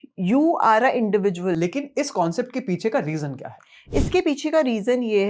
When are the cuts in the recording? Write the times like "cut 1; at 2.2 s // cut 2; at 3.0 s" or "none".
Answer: cut 1; at 1.6 s